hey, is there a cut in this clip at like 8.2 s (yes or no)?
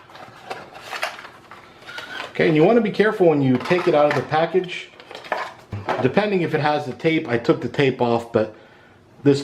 no